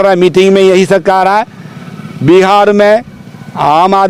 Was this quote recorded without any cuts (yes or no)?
yes